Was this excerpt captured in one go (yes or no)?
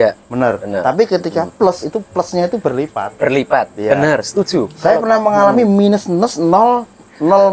yes